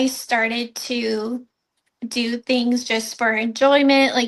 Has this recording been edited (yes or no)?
yes